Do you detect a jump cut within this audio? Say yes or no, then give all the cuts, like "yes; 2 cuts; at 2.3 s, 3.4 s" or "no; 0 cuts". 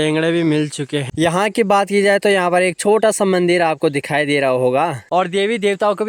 yes; 2 cuts; at 1.1 s, 5.0 s